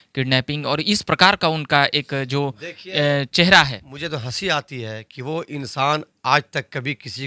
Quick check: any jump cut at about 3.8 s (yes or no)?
no